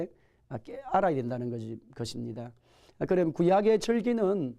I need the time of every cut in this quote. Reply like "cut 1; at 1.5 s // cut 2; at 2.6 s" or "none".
cut 1; at 1.7 s